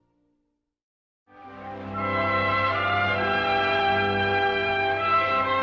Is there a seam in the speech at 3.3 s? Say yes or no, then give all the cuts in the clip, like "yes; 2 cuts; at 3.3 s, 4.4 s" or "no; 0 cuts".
yes; 1 cut; at 3.3 s